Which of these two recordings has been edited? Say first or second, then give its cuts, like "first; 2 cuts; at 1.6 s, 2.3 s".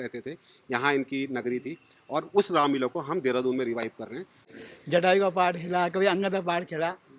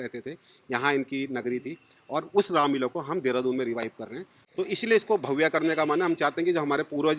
first; 1 cut; at 4.5 s